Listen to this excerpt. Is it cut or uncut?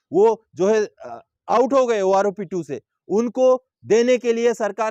uncut